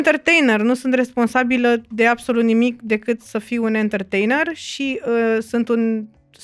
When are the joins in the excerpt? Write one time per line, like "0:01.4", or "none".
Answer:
none